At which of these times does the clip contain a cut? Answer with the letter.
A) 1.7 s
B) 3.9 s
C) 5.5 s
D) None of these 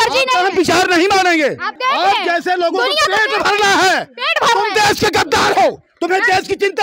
A